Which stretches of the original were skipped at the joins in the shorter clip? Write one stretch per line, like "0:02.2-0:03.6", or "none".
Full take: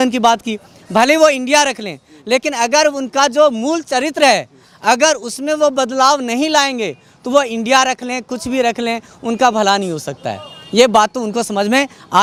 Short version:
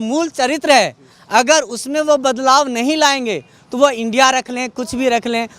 none